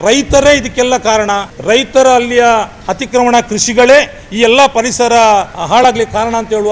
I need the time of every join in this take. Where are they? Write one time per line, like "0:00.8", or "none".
0:01.5
0:05.6